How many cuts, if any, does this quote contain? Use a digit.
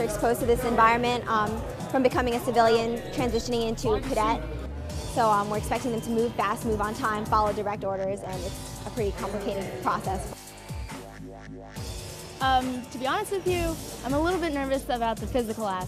0